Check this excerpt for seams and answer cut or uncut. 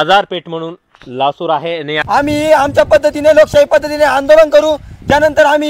cut